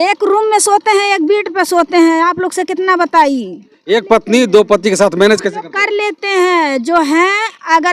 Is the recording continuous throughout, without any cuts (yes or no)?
no